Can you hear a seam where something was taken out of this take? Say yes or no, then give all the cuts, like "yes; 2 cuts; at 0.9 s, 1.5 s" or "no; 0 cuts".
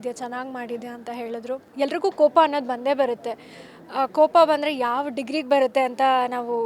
yes; 1 cut; at 1.6 s